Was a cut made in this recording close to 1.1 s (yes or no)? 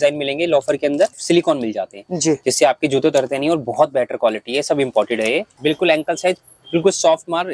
yes